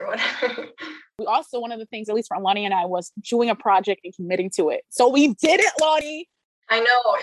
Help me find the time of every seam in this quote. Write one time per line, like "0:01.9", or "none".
0:01.2